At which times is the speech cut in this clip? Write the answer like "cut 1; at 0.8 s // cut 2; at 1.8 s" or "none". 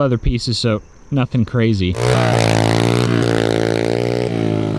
cut 1; at 2.0 s